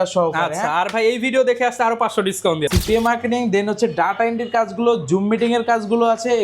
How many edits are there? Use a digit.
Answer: 1